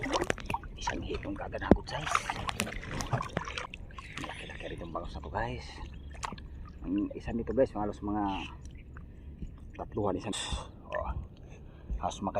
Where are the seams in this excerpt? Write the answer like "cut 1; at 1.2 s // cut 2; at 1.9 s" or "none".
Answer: cut 1; at 3.7 s // cut 2; at 10.4 s

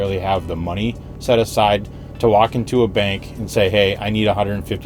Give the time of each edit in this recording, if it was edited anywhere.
none

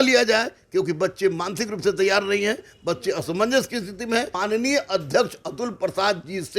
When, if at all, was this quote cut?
cut 1; at 4.3 s

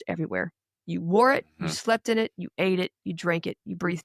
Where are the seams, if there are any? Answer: none

